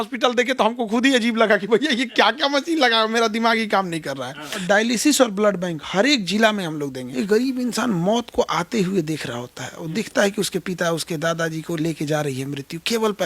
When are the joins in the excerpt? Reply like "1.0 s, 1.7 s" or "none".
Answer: 4.6 s, 7.0 s